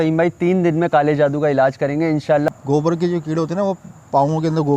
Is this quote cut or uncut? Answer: cut